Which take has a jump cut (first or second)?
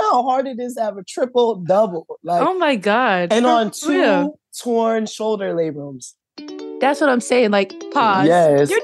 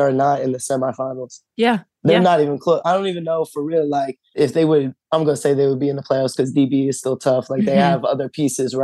first